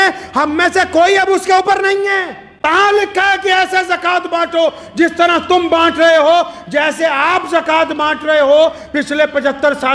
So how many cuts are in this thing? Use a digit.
1